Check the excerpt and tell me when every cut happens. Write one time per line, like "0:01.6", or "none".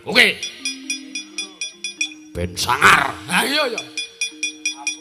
none